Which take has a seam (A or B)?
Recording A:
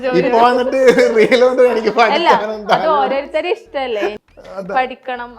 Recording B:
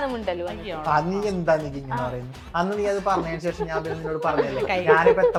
A